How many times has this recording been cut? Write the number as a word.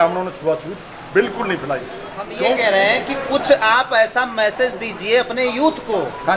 one